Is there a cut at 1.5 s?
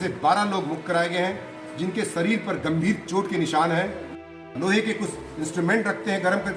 no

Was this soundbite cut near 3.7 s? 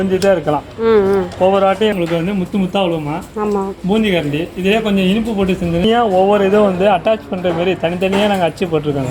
no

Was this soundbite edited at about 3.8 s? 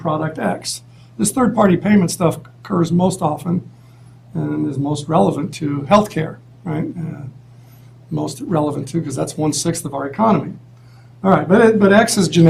no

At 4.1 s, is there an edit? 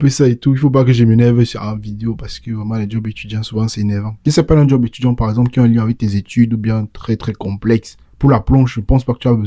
yes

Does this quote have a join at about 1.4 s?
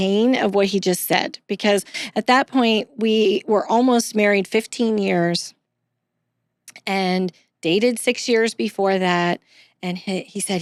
no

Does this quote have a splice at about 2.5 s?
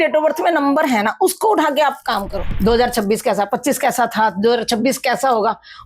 yes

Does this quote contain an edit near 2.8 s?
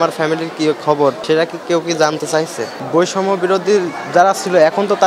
yes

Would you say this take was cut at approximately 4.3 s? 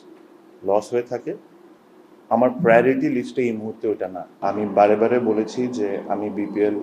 yes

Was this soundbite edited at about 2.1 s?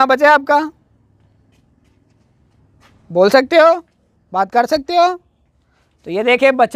no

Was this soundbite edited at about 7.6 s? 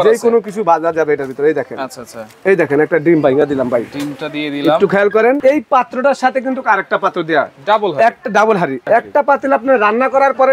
no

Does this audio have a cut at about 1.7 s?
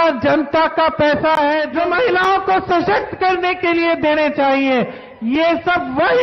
yes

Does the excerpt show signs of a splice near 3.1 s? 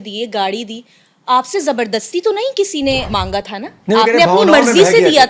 yes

